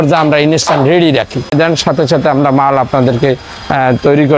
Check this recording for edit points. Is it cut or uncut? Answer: cut